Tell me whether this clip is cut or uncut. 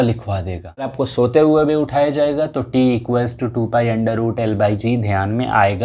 cut